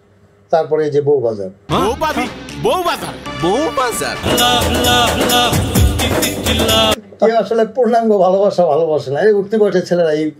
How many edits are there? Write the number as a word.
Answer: one